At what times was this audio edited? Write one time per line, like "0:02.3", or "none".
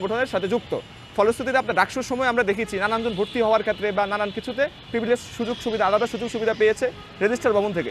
none